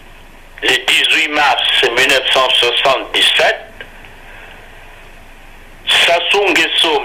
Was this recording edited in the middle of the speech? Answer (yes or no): no